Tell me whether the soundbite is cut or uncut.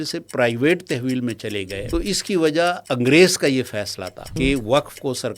cut